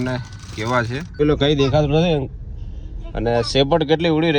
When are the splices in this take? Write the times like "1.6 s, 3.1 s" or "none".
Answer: 1.2 s